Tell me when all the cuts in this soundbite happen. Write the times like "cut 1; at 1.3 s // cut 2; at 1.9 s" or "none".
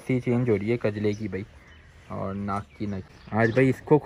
cut 1; at 3.0 s